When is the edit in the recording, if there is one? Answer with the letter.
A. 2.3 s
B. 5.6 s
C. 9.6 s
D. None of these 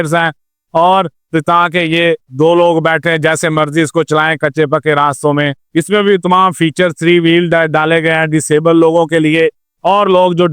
B